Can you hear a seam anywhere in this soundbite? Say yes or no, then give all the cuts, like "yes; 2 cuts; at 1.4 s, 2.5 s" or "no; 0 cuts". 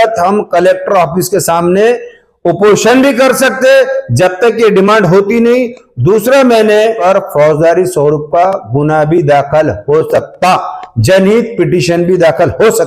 yes; 1 cut; at 7.0 s